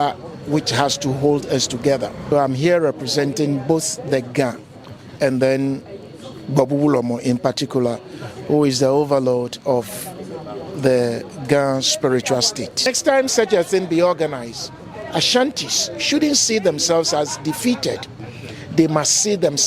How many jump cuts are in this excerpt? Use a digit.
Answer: 2